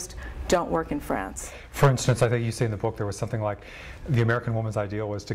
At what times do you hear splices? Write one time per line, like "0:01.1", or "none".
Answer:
none